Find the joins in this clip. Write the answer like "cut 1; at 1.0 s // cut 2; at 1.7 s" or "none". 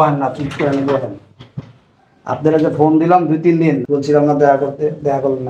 cut 1; at 3.8 s